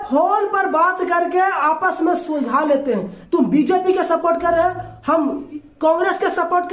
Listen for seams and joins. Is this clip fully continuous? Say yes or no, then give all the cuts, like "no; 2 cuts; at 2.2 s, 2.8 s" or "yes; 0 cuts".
no; 1 cut; at 3.2 s